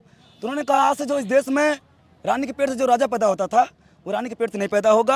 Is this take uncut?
yes; 0 cuts

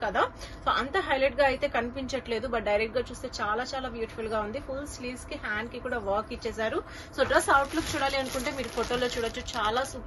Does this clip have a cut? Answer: no; 0 cuts

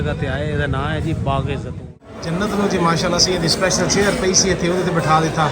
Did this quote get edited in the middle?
yes; 1 cut; at 1.9 s

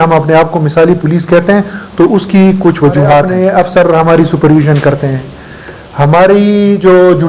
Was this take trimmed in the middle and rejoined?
yes; 1 cut; at 3.3 s

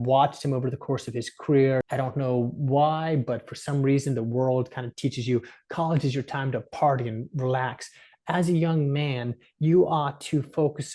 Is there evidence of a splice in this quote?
yes; 1 cut; at 1.9 s

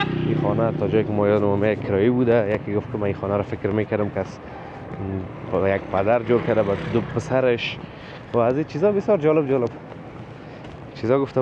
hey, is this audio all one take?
yes; 0 cuts

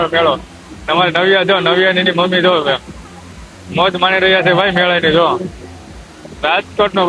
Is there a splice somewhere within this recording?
no; 0 cuts

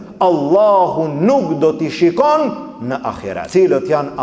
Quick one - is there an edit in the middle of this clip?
yes; 1 cut; at 3.3 s

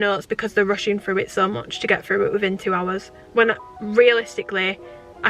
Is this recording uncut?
no; 1 cut; at 3.1 s

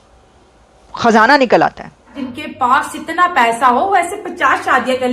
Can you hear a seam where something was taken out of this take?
yes; 1 cut; at 2.2 s

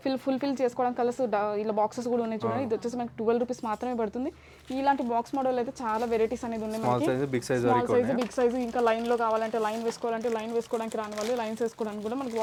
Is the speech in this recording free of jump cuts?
yes; 0 cuts

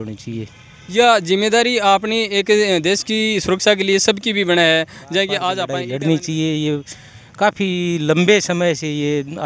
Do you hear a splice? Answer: yes; 1 cut; at 5.7 s

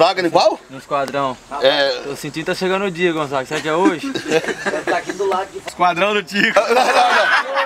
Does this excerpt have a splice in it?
yes; 1 cut; at 5.6 s

